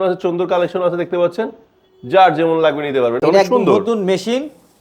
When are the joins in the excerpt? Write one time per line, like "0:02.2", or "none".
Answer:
0:03.2

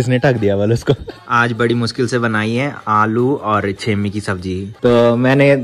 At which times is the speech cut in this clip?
0:01.3
0:04.7

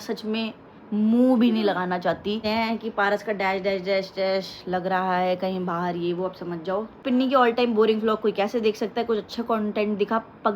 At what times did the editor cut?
0:02.4
0:07.0

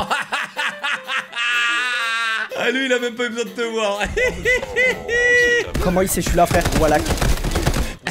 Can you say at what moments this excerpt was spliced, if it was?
0:05.7

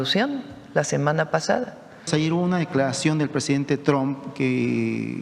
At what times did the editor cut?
0:02.1

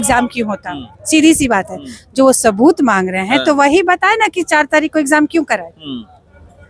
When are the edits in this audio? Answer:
none

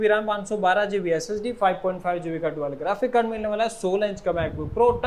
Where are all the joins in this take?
none

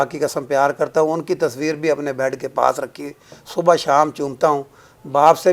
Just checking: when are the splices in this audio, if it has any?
none

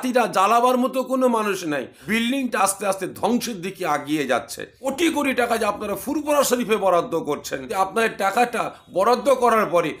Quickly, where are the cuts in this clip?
0:01.9
0:04.8
0:07.6

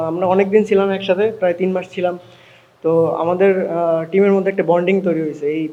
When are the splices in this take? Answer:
none

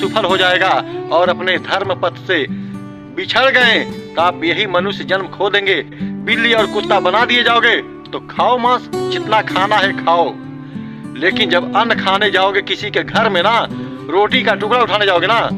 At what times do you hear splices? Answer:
0:04.0
0:06.0

